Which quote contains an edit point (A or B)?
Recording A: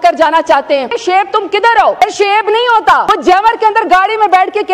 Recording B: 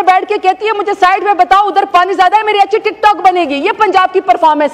A